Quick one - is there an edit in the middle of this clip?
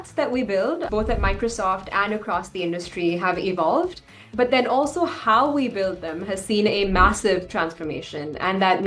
yes; 2 cuts; at 0.9 s, 4.3 s

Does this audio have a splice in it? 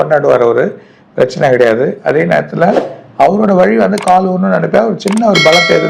no; 0 cuts

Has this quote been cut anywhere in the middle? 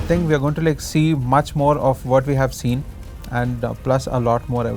no; 0 cuts

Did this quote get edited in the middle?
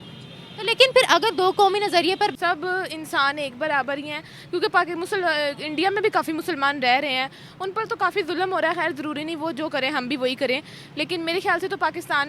yes; 1 cut; at 2.3 s

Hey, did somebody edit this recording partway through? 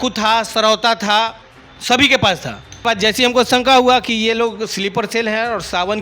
yes; 1 cut; at 2.9 s

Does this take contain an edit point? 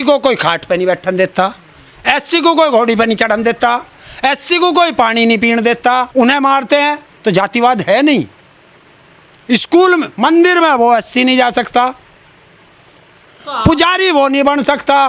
no; 0 cuts

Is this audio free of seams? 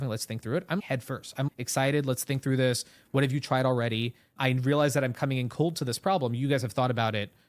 no; 2 cuts; at 1.3 s, 4.3 s

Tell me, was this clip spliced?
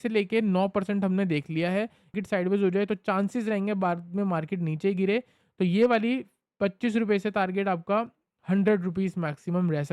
yes; 1 cut; at 2.1 s

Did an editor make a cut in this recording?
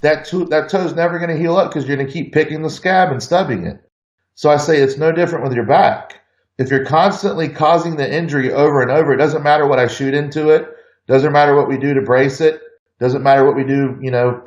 no; 0 cuts

